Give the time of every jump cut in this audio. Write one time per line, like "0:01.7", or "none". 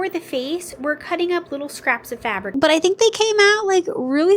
0:02.5